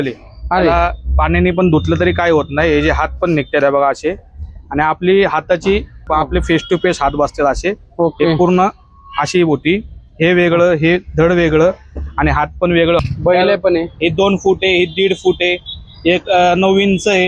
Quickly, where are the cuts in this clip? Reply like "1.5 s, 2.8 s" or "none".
6.0 s, 13.0 s